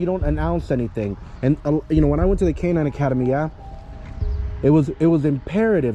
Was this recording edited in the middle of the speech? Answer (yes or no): no